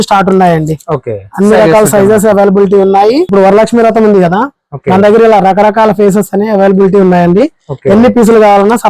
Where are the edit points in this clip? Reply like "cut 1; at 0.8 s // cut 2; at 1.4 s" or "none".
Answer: cut 1; at 3.3 s